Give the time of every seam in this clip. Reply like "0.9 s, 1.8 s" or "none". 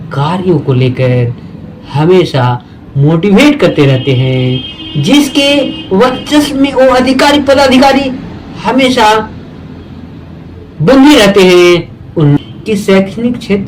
12.4 s